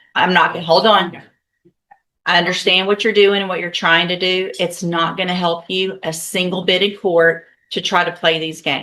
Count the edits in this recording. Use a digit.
0